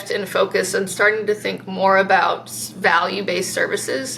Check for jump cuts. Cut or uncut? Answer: uncut